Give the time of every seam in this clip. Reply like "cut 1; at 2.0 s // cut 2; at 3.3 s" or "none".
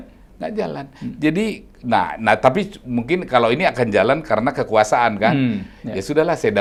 none